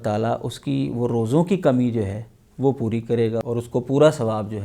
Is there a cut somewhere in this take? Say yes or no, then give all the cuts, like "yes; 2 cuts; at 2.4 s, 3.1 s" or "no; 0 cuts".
no; 0 cuts